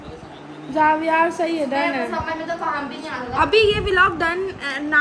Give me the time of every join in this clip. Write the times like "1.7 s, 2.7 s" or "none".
none